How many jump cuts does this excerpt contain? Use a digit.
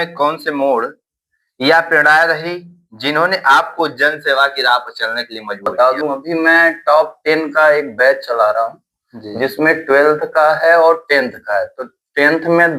1